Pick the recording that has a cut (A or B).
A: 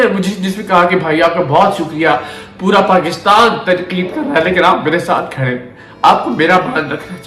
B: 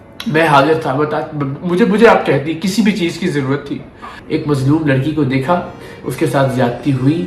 B